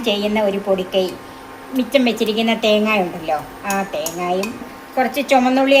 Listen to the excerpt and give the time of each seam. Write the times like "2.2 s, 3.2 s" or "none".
4.6 s